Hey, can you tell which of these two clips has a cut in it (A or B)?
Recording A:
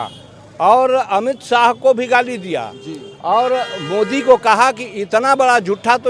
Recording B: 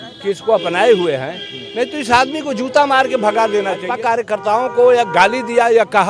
B